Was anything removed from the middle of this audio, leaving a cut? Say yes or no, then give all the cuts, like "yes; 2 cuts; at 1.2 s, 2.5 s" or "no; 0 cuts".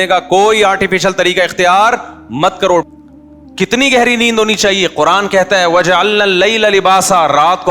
yes; 1 cut; at 2.9 s